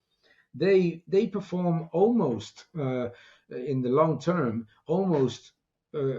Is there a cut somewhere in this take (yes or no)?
no